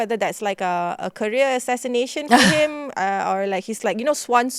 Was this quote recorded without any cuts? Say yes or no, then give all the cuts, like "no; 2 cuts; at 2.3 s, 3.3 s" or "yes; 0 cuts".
yes; 0 cuts